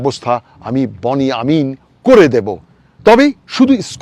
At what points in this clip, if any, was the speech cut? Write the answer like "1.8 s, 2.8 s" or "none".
none